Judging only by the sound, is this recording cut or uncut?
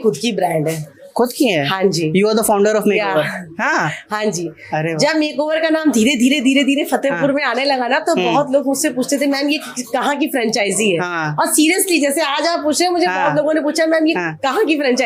uncut